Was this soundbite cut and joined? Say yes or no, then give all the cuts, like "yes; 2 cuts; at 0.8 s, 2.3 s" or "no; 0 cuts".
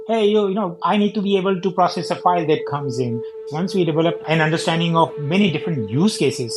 yes; 1 cut; at 3.5 s